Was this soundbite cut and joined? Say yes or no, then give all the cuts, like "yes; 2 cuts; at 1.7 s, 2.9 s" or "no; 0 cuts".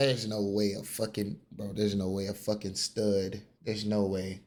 no; 0 cuts